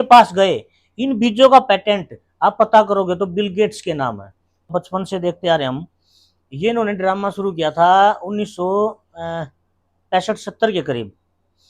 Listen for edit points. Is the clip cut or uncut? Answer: cut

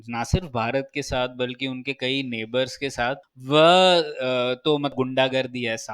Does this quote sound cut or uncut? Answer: cut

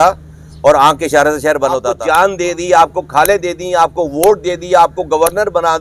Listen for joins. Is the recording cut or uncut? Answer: cut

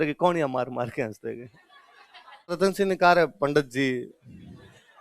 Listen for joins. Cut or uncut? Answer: cut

